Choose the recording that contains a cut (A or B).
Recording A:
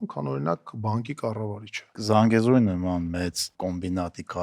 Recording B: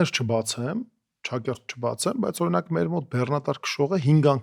A